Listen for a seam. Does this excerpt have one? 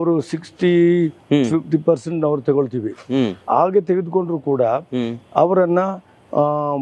no; 0 cuts

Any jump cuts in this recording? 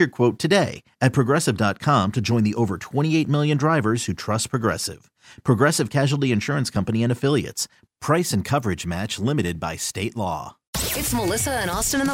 yes; 1 cut; at 10.7 s

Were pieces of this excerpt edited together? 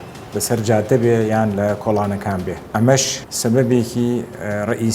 yes; 2 cuts; at 2.6 s, 3.2 s

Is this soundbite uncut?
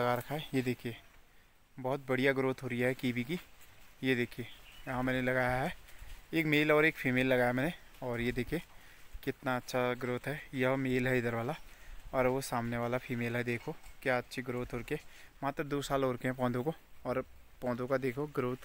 yes; 0 cuts

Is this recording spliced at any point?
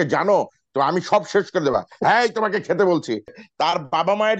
yes; 1 cut; at 3.4 s

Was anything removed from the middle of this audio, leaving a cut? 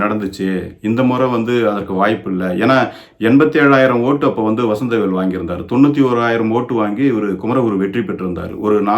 no; 0 cuts

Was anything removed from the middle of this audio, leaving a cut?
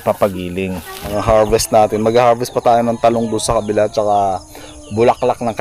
yes; 1 cut; at 1.0 s

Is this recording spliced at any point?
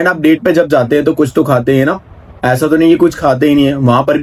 no; 0 cuts

